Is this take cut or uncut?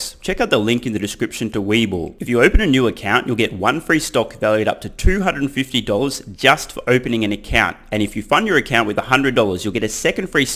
uncut